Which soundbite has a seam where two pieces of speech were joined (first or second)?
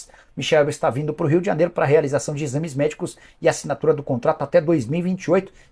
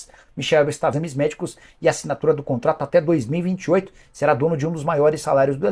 second